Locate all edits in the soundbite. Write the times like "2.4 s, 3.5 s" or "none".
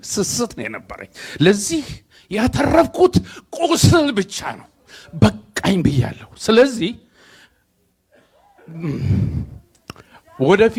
none